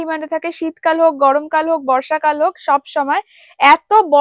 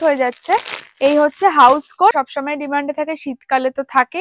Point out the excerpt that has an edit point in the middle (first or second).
second